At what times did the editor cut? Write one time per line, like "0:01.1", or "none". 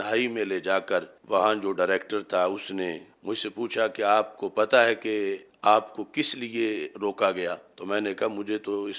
0:01.2
0:03.1
0:05.5
0:07.7